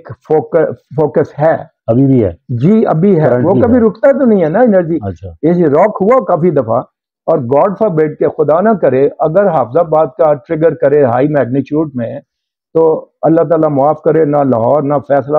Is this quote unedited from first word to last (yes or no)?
yes